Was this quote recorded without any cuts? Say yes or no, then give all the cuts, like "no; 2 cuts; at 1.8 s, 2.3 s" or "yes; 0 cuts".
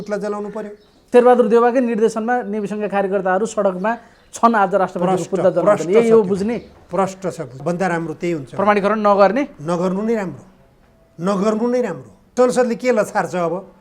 no; 3 cuts; at 0.9 s, 7.6 s, 12.3 s